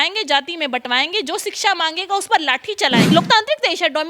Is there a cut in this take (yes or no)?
yes